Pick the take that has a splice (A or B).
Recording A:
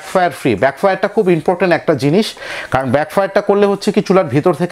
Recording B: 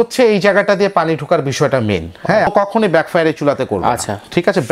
B